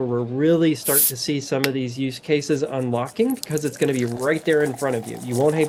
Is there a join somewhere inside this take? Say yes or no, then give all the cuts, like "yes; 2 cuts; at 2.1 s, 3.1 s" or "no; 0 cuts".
no; 0 cuts